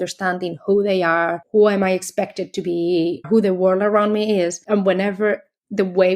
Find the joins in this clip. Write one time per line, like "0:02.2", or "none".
0:01.4
0:03.2
0:04.6